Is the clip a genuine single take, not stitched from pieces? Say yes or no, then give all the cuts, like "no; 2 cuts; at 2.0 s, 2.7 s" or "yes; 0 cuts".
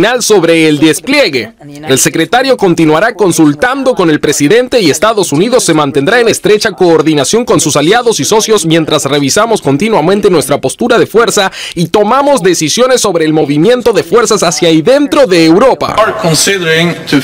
no; 1 cut; at 15.9 s